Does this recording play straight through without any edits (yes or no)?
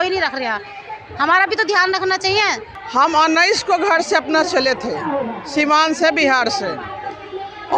no